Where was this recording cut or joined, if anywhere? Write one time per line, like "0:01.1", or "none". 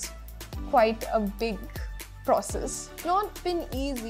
0:03.0